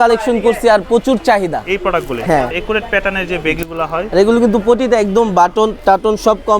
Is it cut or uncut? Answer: cut